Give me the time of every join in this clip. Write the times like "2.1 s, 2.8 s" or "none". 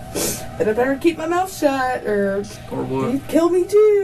2.6 s